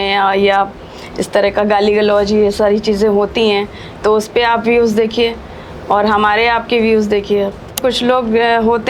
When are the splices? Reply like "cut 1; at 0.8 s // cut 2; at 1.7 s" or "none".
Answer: cut 1; at 7.8 s